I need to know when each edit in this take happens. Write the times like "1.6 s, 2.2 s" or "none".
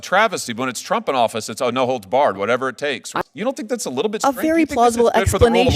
3.1 s